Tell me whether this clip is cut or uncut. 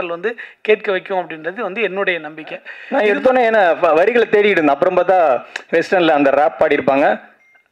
cut